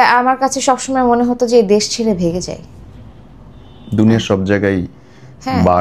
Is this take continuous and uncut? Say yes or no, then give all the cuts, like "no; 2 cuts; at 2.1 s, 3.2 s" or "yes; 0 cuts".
yes; 0 cuts